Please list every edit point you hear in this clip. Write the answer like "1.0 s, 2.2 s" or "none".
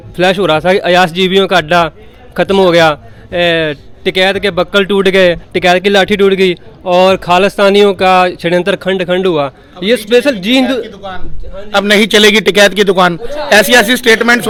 none